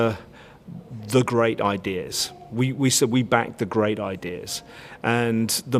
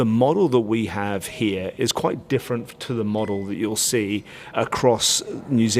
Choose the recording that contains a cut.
second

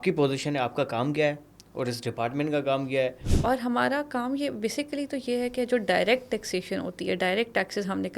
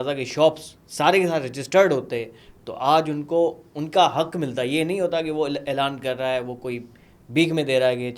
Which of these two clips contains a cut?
first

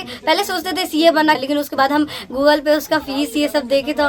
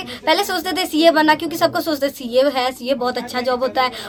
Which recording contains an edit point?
first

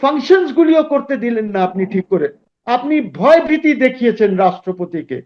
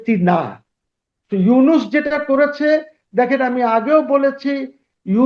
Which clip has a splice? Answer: first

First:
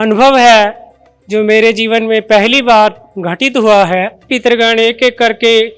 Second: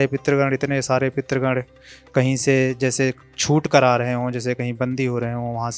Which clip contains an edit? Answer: first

